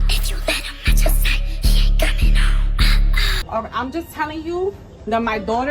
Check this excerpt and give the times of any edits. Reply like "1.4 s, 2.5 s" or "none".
3.3 s